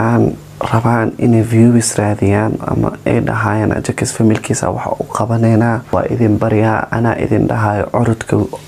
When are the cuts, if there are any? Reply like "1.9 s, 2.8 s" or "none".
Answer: 5.8 s